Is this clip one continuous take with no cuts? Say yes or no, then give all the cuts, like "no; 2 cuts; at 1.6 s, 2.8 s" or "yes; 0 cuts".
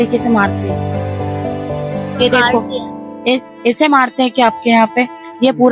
yes; 0 cuts